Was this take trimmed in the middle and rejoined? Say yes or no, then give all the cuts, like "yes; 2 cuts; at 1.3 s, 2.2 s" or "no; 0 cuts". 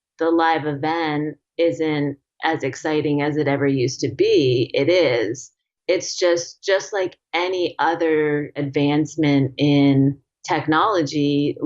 yes; 1 cut; at 8.6 s